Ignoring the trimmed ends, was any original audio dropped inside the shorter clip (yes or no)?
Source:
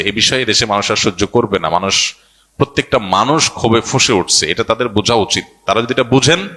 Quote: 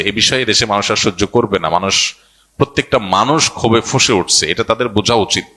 no